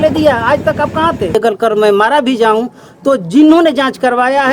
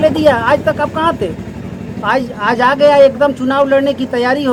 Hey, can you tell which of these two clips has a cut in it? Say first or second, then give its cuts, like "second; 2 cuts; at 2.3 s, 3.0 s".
first; 1 cut; at 1.3 s